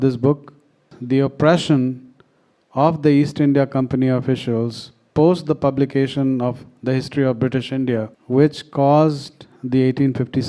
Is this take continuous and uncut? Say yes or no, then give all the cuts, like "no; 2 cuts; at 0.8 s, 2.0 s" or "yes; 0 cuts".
no; 2 cuts; at 0.9 s, 8.1 s